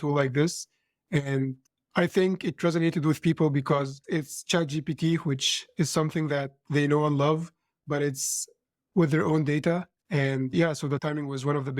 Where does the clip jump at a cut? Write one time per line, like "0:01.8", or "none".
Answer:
0:10.0

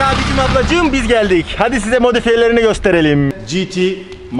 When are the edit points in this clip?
0:03.4

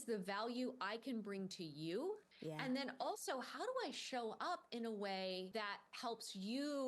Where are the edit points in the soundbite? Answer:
0:02.3
0:05.5

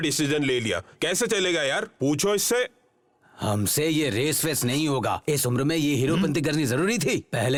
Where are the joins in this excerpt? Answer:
none

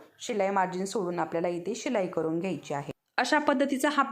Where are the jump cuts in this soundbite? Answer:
0:03.0

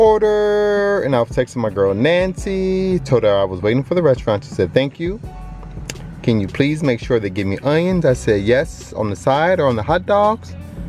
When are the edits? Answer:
none

